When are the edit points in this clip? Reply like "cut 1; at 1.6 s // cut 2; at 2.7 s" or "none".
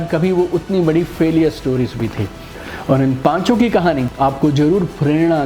cut 1; at 4.0 s